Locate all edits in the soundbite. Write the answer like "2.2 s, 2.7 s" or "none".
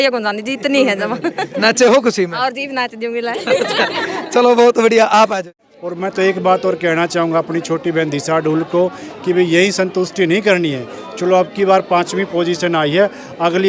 5.4 s